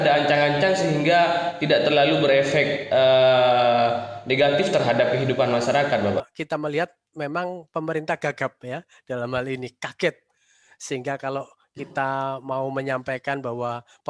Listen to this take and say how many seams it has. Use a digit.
1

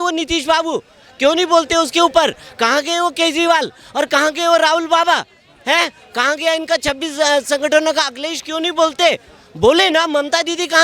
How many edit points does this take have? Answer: 0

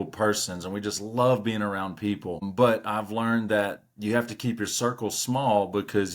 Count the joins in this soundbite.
1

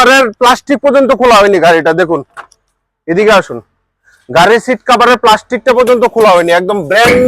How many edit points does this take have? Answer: 0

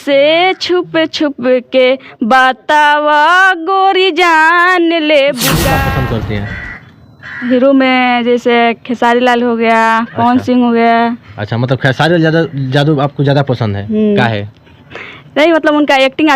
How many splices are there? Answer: 1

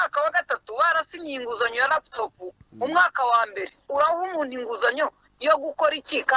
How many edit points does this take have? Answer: 1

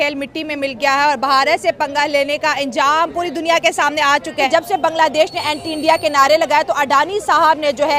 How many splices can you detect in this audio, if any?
1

